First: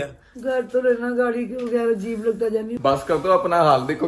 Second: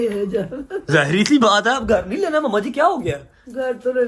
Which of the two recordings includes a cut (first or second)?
first